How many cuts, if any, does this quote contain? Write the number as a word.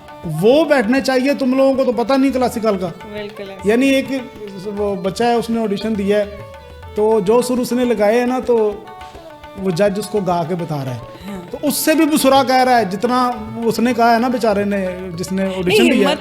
zero